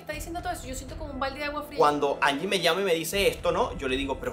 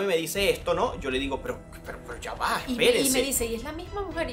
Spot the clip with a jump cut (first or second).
first